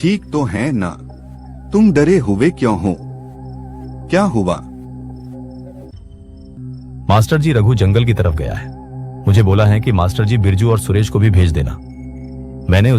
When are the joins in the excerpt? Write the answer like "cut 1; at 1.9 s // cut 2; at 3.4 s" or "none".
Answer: cut 1; at 6.5 s